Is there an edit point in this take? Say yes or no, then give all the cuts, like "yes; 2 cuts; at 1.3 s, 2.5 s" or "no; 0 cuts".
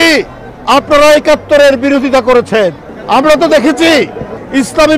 yes; 1 cut; at 2.9 s